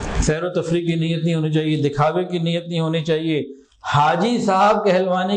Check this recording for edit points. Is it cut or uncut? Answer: uncut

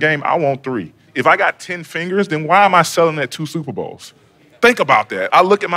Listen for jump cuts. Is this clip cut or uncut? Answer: cut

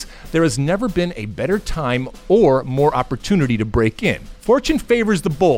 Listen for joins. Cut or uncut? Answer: cut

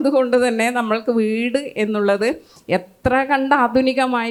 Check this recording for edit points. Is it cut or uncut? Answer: uncut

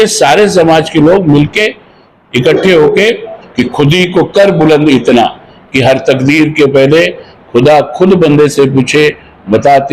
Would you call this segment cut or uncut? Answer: cut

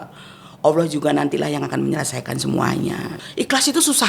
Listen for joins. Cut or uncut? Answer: cut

